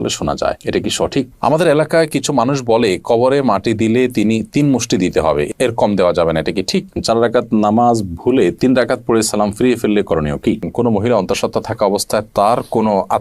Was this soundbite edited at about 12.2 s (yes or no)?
no